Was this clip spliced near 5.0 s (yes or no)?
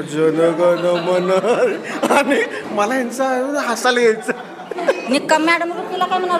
yes